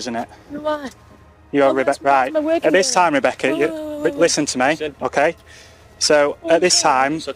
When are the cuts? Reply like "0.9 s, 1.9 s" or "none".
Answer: none